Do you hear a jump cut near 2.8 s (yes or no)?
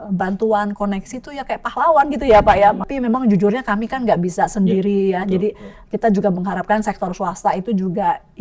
yes